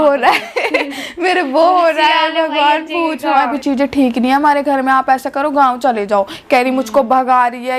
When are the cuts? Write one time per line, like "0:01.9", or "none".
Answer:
0:03.5